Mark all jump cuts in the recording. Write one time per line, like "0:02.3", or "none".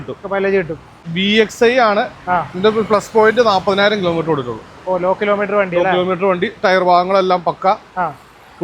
0:01.1